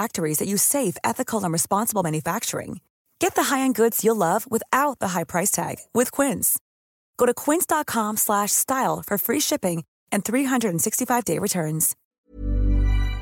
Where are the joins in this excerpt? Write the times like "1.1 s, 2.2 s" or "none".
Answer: 12.0 s